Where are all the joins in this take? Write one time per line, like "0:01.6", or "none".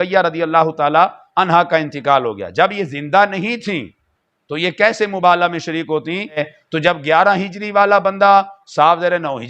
0:06.5